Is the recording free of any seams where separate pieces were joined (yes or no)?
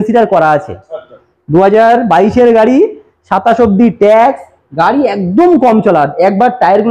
yes